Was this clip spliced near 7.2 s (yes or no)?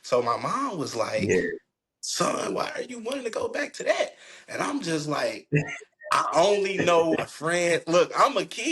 yes